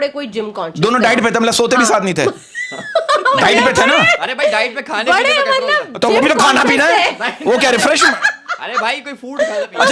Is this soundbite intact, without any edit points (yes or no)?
yes